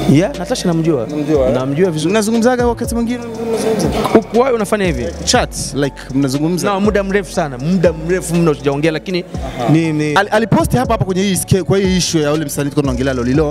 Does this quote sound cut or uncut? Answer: cut